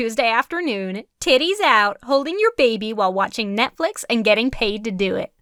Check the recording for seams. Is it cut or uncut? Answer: uncut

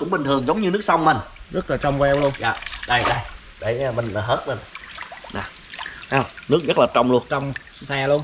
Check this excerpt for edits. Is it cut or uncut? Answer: uncut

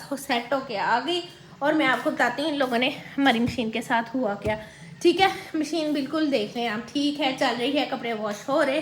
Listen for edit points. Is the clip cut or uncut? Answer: uncut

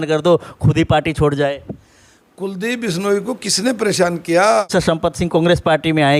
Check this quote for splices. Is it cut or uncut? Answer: cut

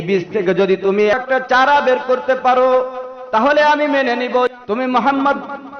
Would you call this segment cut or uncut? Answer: cut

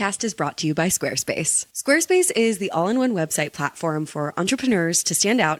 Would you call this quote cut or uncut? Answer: uncut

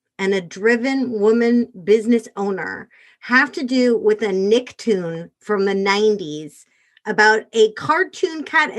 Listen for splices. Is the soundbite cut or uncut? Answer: uncut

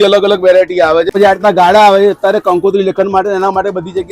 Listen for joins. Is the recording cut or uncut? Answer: cut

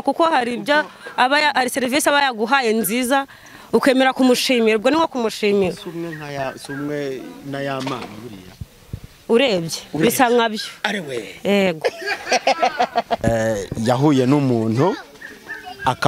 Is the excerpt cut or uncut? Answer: cut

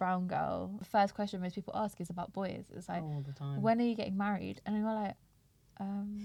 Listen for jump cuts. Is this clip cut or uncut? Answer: uncut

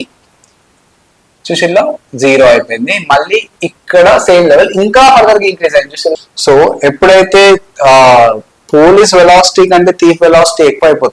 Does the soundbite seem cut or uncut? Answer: cut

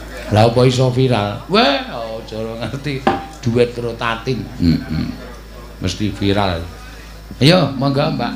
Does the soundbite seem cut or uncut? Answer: uncut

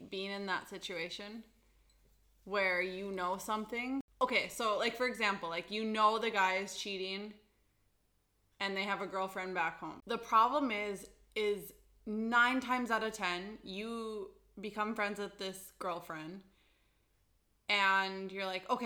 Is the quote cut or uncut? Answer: cut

